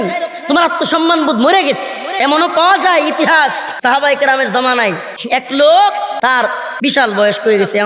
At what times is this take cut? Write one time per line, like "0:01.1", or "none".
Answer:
0:02.0
0:03.7
0:05.1
0:06.3